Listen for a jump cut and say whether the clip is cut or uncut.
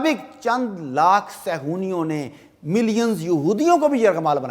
uncut